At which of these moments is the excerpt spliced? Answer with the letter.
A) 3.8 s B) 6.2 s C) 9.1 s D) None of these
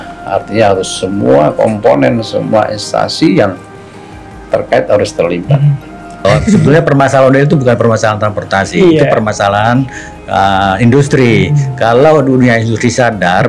B